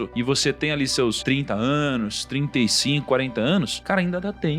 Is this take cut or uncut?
uncut